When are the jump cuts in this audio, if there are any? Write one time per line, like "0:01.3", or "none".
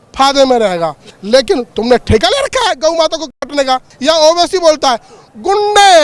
0:01.1
0:03.9